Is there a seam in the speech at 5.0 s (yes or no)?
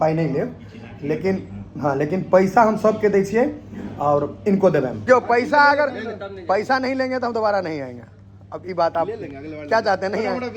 yes